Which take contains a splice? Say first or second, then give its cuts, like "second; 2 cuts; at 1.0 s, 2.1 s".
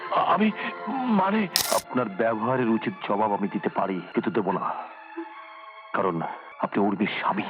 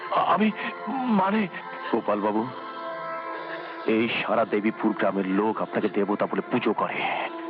first; 3 cuts; at 1.6 s, 4.1 s, 6.5 s